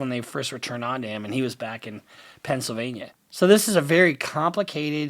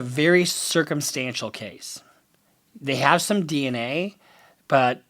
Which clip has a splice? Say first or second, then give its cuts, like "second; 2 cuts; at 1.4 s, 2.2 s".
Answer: first; 1 cut; at 3.2 s